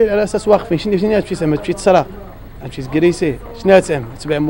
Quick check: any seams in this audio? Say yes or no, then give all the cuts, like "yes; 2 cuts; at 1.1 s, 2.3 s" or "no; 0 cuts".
no; 0 cuts